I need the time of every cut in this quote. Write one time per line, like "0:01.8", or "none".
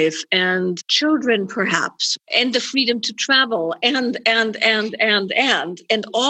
0:00.9
0:02.1